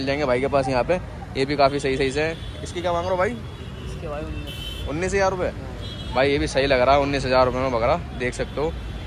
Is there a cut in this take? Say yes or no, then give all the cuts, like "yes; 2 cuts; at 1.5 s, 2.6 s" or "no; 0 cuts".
no; 0 cuts